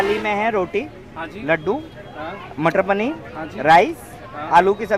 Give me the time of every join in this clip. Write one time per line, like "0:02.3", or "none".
none